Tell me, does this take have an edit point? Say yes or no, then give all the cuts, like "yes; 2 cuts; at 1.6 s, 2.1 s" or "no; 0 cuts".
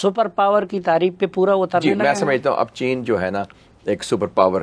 no; 0 cuts